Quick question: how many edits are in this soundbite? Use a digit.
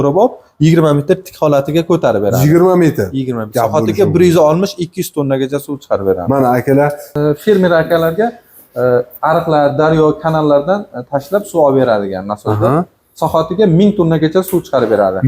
1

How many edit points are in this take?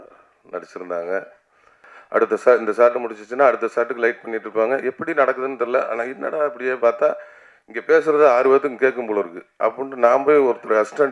1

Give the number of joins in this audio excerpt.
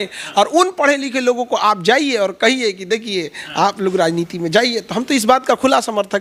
0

